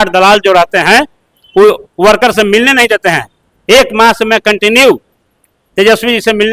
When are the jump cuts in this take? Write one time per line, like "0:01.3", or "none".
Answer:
none